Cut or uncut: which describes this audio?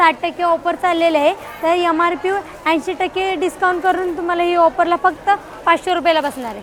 uncut